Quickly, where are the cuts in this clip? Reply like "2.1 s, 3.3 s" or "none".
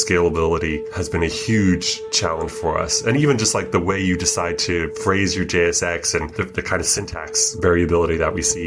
none